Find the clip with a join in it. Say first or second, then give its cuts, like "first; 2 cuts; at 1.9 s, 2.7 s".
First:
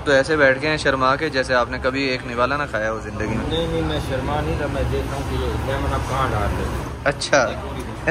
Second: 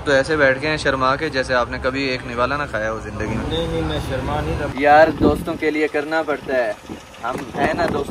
second; 1 cut; at 4.7 s